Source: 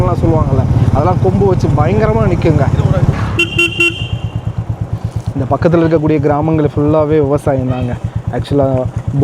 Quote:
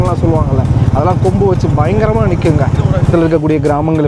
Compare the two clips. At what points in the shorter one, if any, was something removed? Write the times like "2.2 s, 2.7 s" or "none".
3.1 s